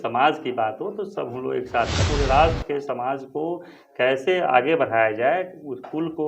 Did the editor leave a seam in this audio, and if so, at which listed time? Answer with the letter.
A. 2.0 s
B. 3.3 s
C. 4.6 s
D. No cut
A